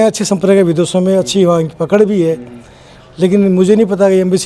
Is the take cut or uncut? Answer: uncut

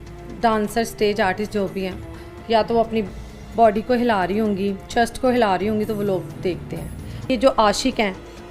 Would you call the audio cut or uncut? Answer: cut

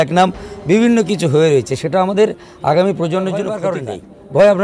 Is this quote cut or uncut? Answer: cut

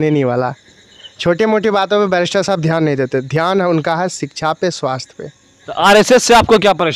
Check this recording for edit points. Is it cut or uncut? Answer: cut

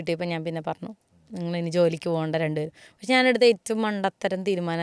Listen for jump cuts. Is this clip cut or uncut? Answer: uncut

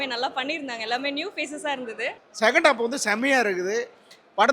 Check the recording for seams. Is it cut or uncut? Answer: cut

